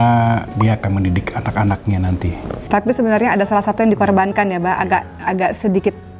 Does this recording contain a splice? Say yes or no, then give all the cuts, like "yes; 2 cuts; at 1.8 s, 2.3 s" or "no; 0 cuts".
yes; 1 cut; at 2.6 s